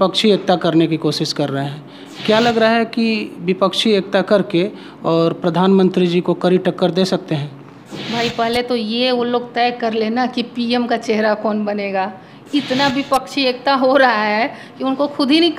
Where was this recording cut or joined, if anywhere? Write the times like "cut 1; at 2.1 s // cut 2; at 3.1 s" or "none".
none